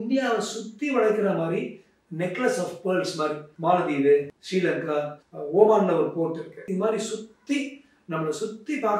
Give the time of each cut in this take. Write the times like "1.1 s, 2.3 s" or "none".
3.5 s, 4.9 s, 6.6 s